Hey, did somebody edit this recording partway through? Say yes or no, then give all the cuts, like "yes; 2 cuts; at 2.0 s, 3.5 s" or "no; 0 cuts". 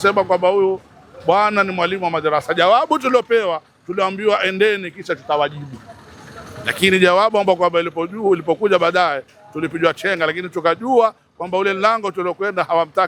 no; 0 cuts